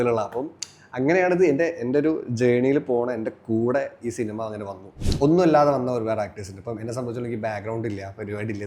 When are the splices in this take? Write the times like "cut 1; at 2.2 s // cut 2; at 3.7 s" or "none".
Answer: cut 1; at 5.0 s